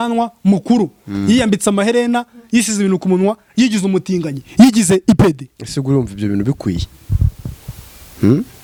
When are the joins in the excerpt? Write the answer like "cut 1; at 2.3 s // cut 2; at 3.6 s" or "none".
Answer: none